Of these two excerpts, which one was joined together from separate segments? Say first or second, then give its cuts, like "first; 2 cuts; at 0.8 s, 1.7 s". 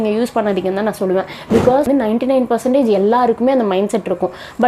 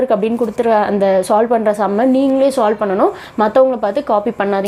first; 1 cut; at 1.8 s